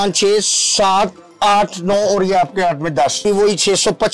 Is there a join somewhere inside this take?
yes; 1 cut; at 3.2 s

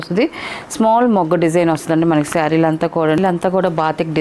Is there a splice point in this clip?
yes; 1 cut; at 3.2 s

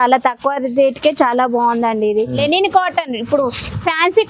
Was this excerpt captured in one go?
no; 1 cut; at 2.4 s

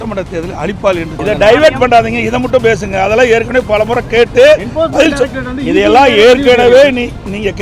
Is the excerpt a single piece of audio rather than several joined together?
no; 1 cut; at 1.2 s

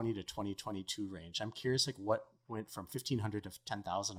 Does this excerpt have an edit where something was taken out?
no; 0 cuts

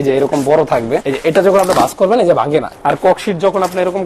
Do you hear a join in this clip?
yes; 2 cuts; at 1.1 s, 2.7 s

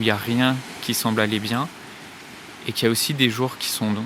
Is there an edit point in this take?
no; 0 cuts

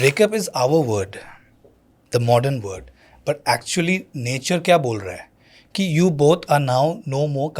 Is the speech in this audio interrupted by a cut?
no; 0 cuts

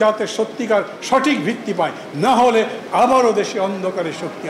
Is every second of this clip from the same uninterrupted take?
yes; 0 cuts

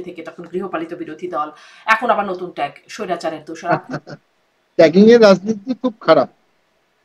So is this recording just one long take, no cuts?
no; 1 cut; at 3.7 s

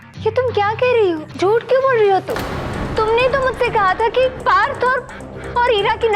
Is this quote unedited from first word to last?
no; 2 cuts; at 1.3 s, 4.4 s

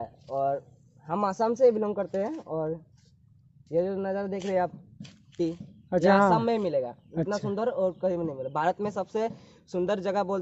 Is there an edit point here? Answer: no; 0 cuts

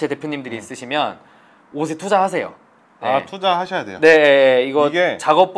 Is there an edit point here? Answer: no; 0 cuts

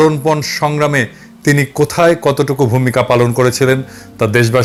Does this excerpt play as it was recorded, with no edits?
yes; 0 cuts

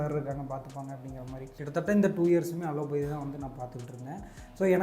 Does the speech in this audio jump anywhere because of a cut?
yes; 1 cut; at 1.6 s

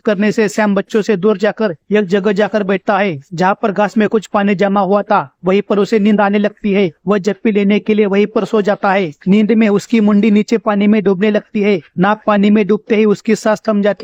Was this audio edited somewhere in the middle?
no; 0 cuts

